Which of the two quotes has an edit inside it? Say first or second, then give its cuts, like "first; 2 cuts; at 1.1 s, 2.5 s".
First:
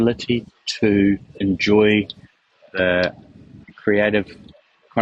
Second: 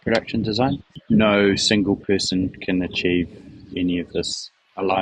second; 1 cut; at 0.9 s